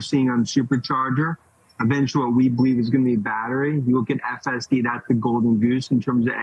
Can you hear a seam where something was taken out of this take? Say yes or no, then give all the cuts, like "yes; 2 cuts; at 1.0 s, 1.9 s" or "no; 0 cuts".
no; 0 cuts